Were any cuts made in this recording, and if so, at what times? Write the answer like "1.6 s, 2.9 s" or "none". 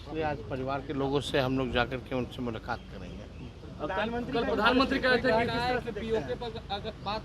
none